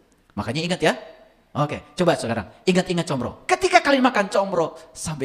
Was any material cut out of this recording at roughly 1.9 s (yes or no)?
no